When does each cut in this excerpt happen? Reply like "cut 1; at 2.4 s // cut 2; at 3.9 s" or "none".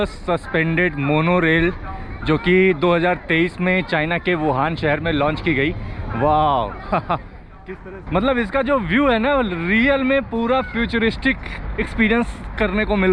none